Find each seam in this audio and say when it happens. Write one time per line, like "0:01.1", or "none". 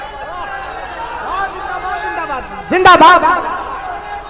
none